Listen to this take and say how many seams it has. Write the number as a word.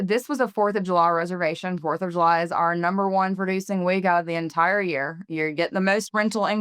zero